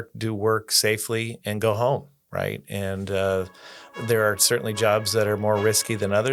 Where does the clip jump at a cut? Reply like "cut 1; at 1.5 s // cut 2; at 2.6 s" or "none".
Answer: none